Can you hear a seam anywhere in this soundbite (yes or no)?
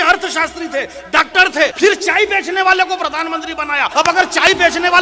yes